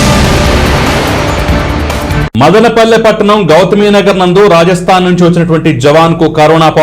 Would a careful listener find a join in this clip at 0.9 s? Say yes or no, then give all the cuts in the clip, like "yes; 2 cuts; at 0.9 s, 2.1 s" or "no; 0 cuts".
no; 1 cut; at 2.3 s